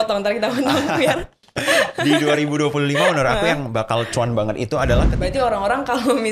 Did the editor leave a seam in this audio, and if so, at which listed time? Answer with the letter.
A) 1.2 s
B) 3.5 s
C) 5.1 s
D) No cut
C